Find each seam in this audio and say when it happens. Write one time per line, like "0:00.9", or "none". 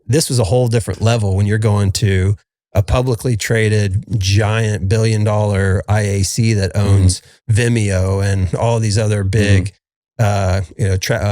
none